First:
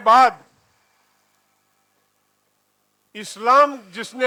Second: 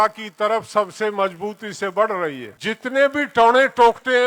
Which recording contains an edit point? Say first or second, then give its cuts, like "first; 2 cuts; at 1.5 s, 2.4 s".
second; 1 cut; at 2.5 s